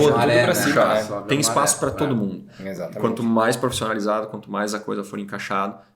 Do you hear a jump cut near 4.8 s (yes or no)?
no